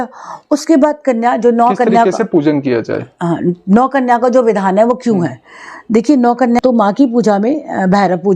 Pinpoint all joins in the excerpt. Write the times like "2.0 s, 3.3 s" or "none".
6.6 s